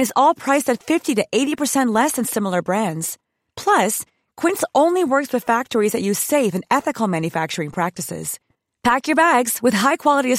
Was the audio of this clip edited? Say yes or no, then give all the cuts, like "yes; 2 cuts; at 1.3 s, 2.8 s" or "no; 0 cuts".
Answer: no; 0 cuts